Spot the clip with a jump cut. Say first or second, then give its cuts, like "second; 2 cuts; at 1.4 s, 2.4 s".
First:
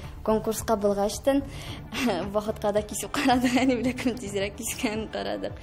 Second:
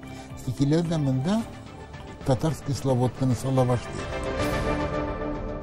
second; 1 cut; at 4.0 s